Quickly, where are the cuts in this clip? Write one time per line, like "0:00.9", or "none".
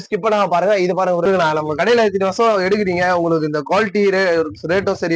0:01.4